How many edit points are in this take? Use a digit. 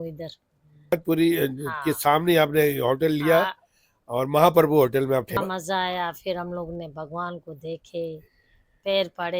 2